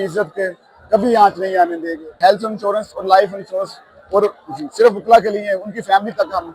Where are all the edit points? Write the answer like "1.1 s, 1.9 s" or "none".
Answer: 2.0 s